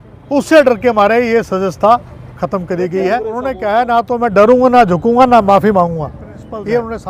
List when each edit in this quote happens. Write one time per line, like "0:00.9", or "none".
0:03.4